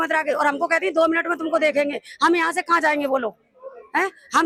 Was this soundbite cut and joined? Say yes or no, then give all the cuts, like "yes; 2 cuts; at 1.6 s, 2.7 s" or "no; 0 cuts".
no; 0 cuts